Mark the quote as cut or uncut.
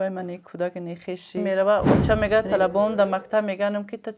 cut